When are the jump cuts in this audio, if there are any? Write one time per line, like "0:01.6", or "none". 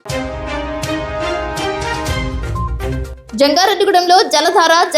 0:02.9